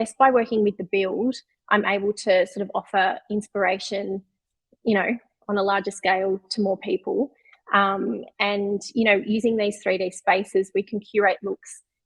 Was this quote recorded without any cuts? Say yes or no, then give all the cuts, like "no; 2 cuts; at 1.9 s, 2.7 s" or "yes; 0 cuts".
yes; 0 cuts